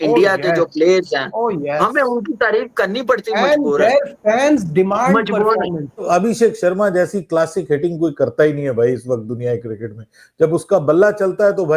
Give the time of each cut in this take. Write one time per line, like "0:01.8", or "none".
0:06.0